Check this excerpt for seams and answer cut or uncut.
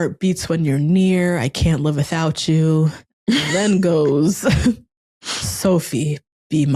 cut